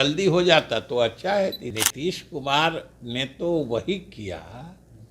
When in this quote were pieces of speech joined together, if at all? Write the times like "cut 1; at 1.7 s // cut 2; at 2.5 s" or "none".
cut 1; at 1.7 s